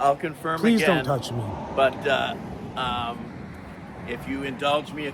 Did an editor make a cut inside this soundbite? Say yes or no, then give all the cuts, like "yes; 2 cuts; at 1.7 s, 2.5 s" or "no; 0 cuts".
no; 0 cuts